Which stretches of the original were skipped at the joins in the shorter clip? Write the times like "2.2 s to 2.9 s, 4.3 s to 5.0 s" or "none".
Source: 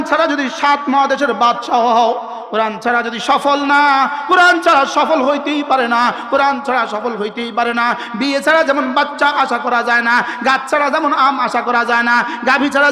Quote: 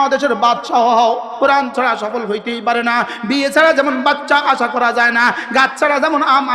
2.3 s to 6.2 s